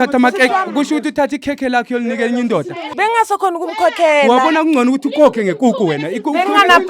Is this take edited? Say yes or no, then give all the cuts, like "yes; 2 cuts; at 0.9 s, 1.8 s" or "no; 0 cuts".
yes; 1 cut; at 2.8 s